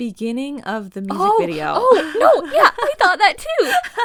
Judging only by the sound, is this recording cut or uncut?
uncut